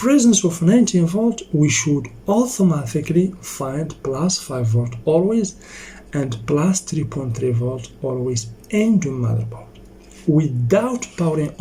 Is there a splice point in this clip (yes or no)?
no